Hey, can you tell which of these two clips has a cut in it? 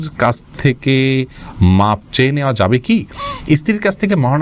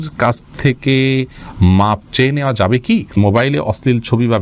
second; 1 cut; at 3.1 s

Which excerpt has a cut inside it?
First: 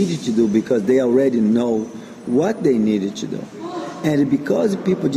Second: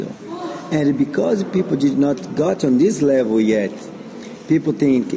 second; 1 cut; at 3.1 s

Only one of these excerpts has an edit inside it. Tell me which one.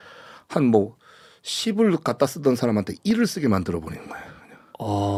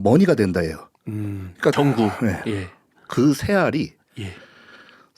second; 1 cut; at 1.7 s

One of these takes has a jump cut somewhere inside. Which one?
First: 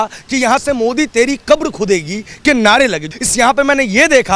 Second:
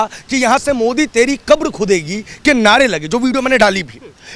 first; 1 cut; at 3.0 s

